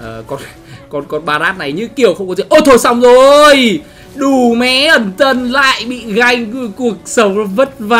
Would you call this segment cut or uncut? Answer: uncut